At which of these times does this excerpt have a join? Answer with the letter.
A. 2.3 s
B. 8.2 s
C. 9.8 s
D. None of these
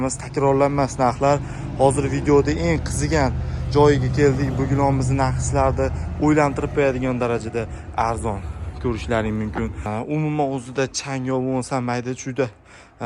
C